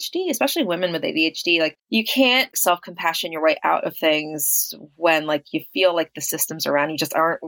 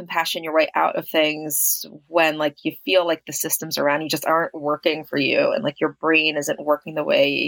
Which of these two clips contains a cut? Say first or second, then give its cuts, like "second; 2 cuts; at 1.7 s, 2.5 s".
first; 1 cut; at 1.8 s